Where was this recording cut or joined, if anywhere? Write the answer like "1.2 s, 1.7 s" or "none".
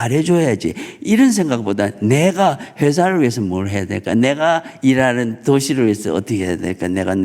none